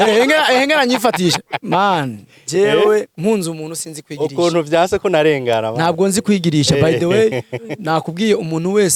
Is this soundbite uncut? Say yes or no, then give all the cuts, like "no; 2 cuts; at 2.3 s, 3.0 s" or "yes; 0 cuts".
yes; 0 cuts